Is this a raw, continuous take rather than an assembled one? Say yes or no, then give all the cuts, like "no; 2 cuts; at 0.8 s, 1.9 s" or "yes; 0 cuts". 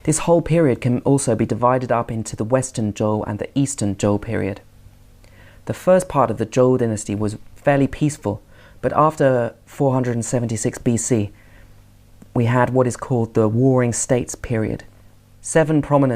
no; 1 cut; at 13.0 s